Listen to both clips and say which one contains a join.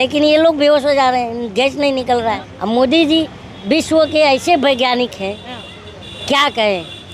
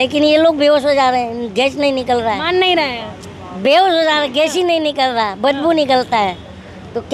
first; 1 cut; at 2.4 s

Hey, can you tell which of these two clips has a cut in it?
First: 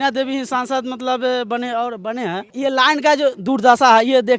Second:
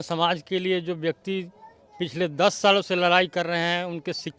first; 1 cut; at 2.5 s

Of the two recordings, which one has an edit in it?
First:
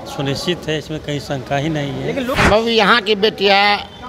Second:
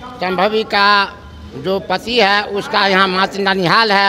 first; 1 cut; at 2.3 s

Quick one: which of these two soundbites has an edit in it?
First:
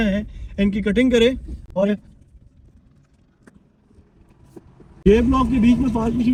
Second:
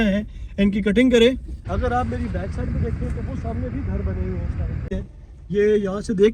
second; 2 cuts; at 1.5 s, 5.0 s

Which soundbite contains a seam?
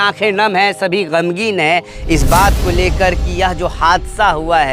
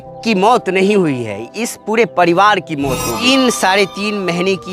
second; 1 cut; at 3.1 s

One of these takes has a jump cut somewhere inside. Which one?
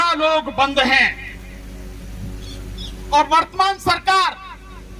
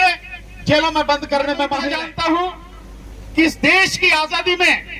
second; 1 cut; at 1.9 s

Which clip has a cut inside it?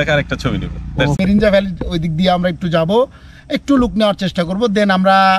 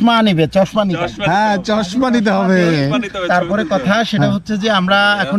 first; 1 cut; at 1.2 s

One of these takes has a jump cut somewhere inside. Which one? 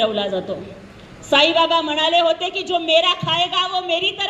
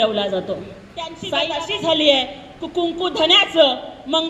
second; 1 cut; at 1.2 s

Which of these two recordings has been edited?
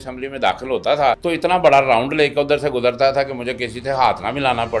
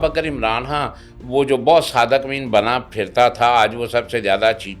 first; 1 cut; at 1.2 s

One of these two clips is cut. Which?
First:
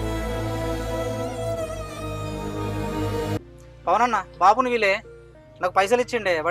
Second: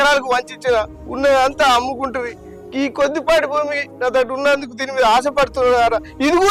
first; 1 cut; at 3.3 s

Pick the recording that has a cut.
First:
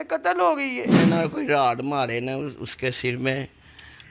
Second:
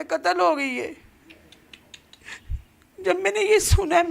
first; 1 cut; at 0.9 s

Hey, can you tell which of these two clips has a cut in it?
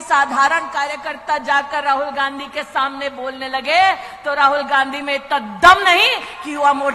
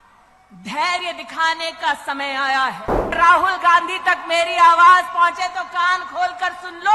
second; 1 cut; at 3.2 s

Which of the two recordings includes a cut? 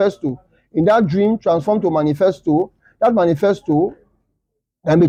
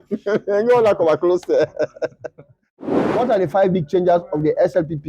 second; 1 cut; at 2.7 s

